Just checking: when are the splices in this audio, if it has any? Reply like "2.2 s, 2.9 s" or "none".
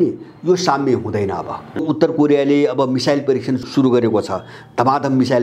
1.8 s, 3.6 s